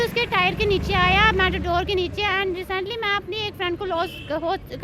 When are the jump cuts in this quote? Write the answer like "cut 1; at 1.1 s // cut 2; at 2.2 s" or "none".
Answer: none